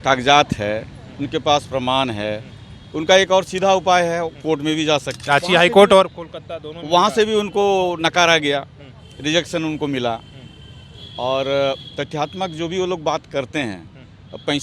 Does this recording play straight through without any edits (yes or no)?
no